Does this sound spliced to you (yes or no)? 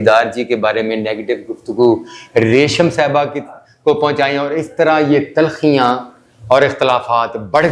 no